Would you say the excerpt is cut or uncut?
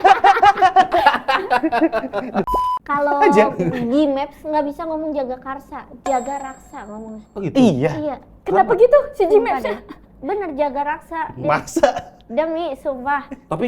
cut